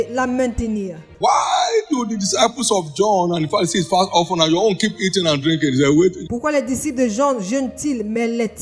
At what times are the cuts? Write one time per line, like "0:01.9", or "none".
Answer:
0:01.1